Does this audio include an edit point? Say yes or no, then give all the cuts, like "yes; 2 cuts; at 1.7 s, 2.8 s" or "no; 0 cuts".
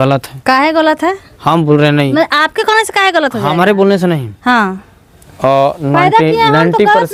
no; 0 cuts